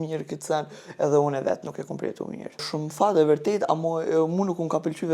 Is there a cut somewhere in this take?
no; 0 cuts

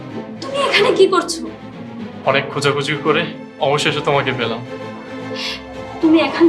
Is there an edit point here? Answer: no; 0 cuts

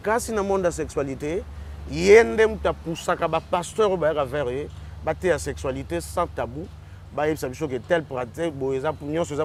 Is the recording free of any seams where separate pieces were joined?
yes; 0 cuts

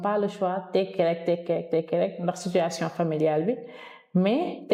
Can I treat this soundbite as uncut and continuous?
yes; 0 cuts

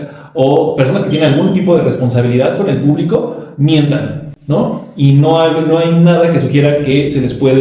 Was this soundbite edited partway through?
no; 0 cuts

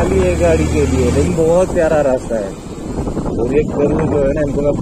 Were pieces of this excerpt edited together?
no; 0 cuts

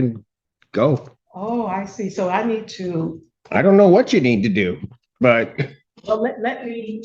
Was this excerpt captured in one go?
no; 2 cuts; at 1.2 s, 5.9 s

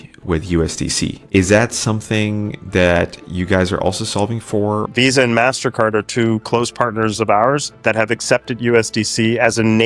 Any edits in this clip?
yes; 2 cuts; at 1.2 s, 4.9 s

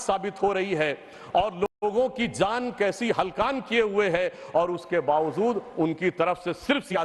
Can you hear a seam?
no; 0 cuts

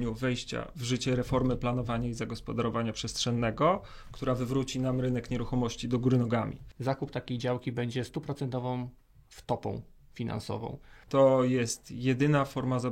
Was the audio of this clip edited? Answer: yes; 2 cuts; at 6.7 s, 11.0 s

